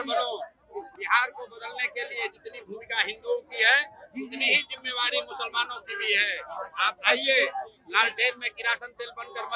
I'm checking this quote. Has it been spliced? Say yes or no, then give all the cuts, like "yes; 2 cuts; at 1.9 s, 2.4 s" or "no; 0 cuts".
yes; 1 cut; at 0.9 s